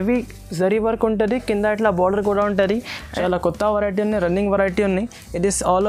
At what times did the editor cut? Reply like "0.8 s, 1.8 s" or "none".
3.0 s